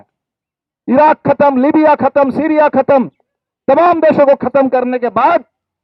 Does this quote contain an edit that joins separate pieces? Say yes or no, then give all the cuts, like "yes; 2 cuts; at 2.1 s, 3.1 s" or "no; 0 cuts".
no; 0 cuts